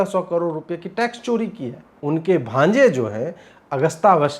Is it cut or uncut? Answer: cut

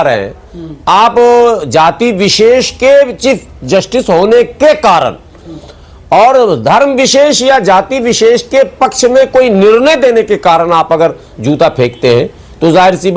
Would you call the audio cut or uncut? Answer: uncut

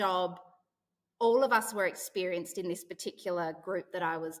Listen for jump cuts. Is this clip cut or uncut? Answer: uncut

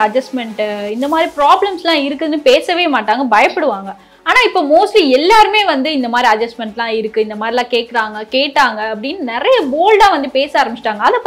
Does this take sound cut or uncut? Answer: uncut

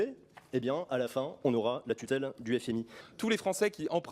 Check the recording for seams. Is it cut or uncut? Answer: cut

